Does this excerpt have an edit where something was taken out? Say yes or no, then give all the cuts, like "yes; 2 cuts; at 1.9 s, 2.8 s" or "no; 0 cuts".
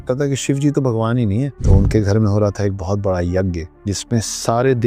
yes; 2 cuts; at 1.6 s, 3.7 s